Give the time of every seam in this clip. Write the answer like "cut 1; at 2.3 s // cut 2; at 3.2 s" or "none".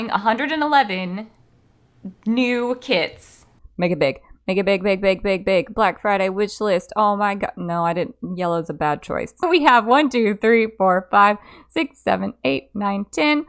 cut 1; at 3.6 s // cut 2; at 9.4 s